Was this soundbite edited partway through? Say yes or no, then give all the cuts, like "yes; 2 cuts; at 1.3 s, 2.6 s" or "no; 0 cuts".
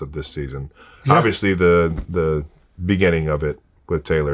no; 0 cuts